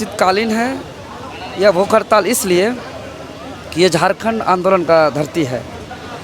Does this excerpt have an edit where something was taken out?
no; 0 cuts

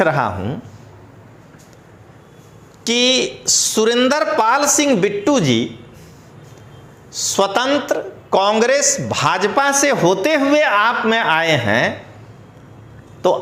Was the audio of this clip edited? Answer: no; 0 cuts

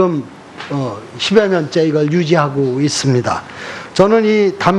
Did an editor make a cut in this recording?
no; 0 cuts

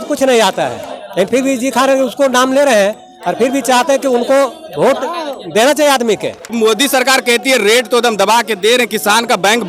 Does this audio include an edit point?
yes; 1 cut; at 6.5 s

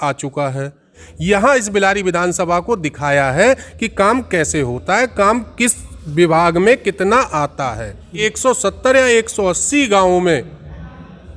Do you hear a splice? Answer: yes; 2 cuts; at 1.1 s, 8.2 s

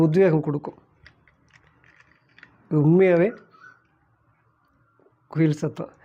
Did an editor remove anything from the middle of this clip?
no; 0 cuts

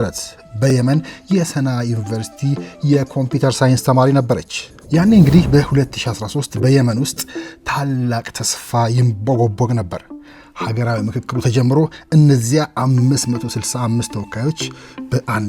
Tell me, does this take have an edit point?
yes; 1 cut; at 4.7 s

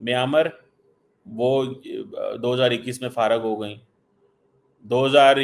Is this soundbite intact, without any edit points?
yes; 0 cuts

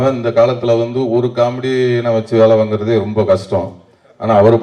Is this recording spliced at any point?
no; 0 cuts

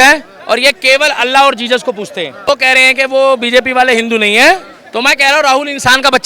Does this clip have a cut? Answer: yes; 1 cut; at 2.6 s

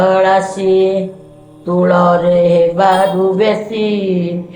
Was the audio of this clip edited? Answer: no; 0 cuts

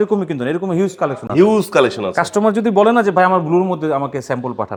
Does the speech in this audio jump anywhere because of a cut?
no; 0 cuts

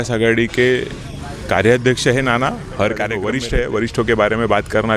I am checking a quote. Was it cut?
yes; 1 cut; at 3.3 s

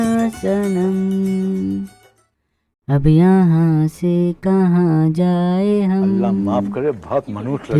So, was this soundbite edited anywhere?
no; 0 cuts

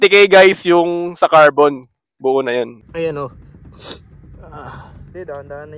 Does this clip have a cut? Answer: yes; 1 cut; at 2.8 s

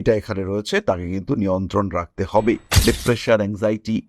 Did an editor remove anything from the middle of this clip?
yes; 1 cut; at 2.6 s

